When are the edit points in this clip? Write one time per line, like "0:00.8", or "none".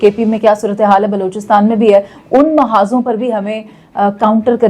none

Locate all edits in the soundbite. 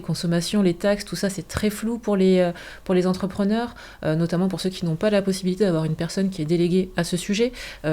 none

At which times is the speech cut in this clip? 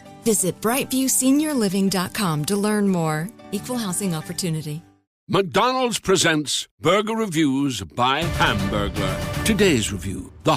0:05.0

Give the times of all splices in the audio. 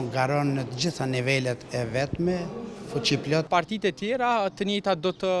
0:03.5

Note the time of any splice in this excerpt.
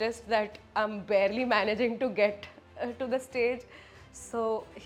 none

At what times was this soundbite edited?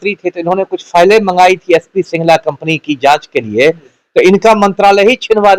none

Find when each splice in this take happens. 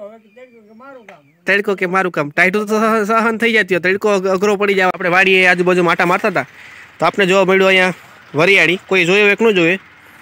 0:04.9

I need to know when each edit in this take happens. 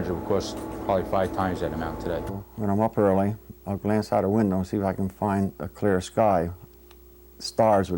0:02.4

